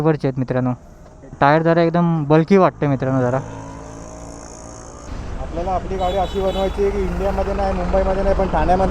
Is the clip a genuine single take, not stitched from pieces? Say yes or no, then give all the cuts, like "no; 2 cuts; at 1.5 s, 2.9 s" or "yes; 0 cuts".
no; 2 cuts; at 1.4 s, 5.1 s